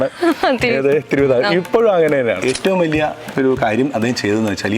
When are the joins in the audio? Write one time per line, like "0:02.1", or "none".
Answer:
0:02.4